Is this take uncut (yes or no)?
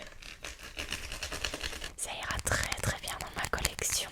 no